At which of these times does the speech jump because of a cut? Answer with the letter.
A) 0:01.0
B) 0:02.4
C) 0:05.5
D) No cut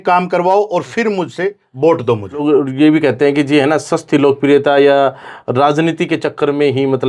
B